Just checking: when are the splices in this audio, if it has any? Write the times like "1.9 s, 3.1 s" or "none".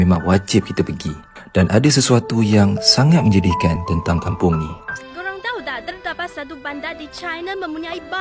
5.0 s